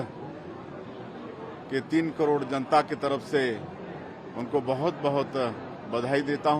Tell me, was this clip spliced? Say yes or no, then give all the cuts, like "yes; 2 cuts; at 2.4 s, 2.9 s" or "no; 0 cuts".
no; 0 cuts